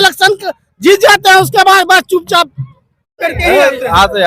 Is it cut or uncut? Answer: cut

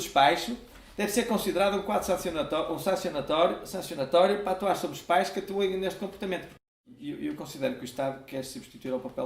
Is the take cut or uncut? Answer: cut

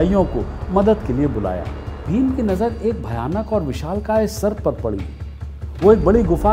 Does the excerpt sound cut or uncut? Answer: cut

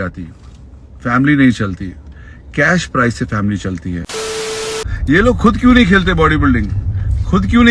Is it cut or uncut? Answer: cut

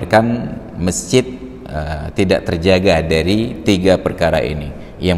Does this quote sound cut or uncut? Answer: uncut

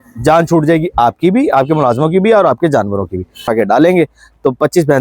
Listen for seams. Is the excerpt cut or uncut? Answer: cut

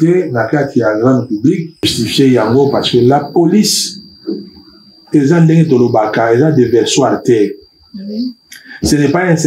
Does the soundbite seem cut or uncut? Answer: cut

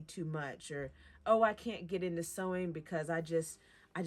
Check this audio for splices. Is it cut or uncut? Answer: cut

